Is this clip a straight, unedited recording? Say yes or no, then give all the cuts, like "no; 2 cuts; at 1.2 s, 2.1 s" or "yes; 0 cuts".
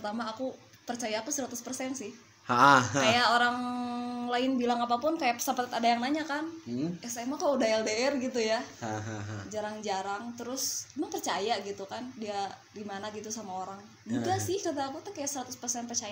yes; 0 cuts